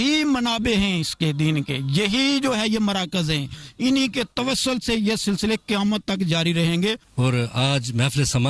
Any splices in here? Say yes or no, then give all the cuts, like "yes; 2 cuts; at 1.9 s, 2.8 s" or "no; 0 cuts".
yes; 1 cut; at 7.1 s